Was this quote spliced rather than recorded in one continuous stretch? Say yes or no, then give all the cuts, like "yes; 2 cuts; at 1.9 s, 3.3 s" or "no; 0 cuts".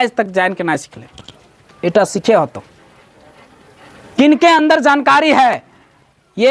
no; 0 cuts